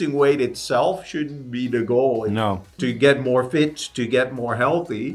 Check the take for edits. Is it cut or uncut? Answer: cut